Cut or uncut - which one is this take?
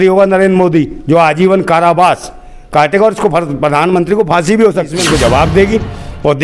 cut